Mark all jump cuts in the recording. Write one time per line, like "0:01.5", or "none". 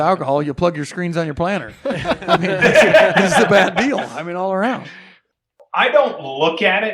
0:05.5